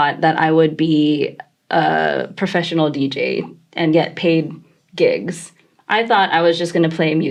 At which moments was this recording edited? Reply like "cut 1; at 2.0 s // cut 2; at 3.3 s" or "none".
none